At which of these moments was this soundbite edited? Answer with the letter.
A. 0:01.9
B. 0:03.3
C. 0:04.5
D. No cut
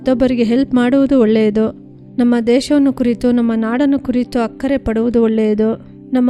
D